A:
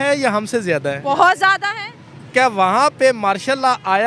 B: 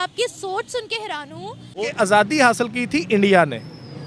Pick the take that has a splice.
B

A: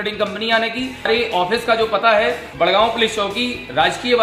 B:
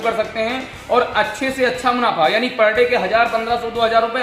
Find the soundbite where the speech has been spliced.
A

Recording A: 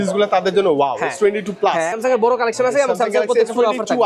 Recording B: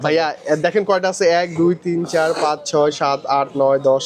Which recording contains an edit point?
A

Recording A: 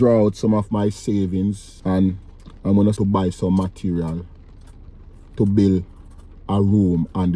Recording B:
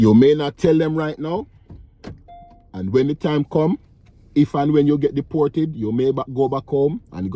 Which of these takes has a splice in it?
A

